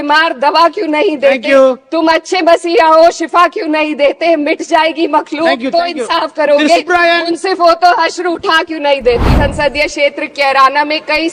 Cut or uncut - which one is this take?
cut